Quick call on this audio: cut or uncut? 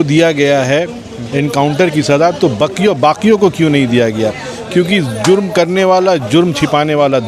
uncut